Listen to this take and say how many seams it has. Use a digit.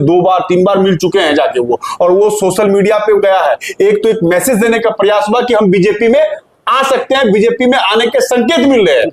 0